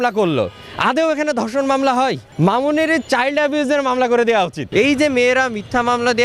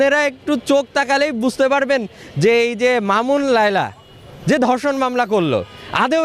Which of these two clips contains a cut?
first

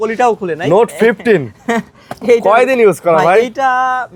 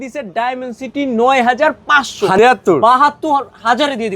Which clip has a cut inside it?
second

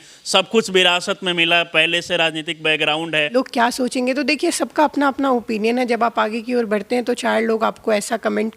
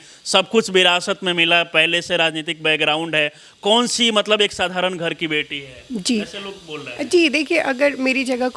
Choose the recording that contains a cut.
first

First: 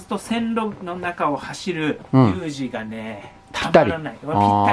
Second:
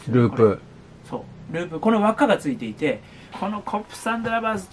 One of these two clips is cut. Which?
second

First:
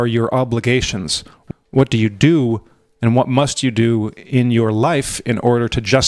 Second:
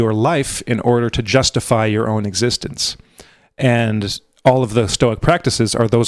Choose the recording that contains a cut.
first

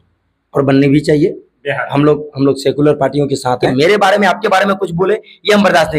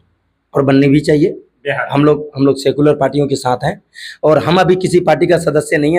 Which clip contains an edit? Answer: first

